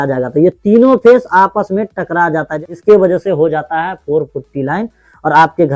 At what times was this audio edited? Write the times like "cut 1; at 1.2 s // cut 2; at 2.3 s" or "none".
cut 1; at 2.8 s